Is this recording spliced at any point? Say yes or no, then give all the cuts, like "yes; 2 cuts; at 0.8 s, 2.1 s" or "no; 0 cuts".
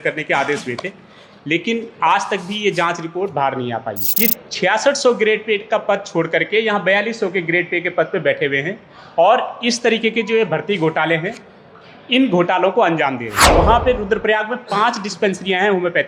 yes; 2 cuts; at 4.0 s, 13.5 s